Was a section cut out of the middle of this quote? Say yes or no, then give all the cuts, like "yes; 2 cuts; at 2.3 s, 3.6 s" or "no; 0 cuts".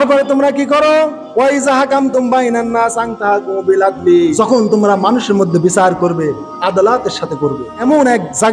yes; 2 cuts; at 4.3 s, 7.8 s